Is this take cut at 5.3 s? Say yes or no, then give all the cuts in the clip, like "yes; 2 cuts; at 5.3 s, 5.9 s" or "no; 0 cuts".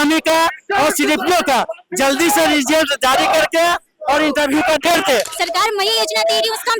yes; 1 cut; at 5.3 s